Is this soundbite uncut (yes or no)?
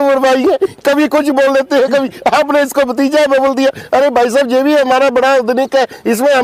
yes